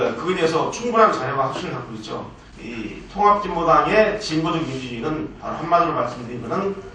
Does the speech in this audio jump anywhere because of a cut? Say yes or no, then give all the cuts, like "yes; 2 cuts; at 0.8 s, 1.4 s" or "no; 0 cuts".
yes; 1 cut; at 2.4 s